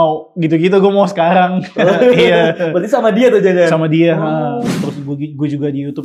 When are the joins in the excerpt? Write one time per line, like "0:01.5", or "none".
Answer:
0:04.7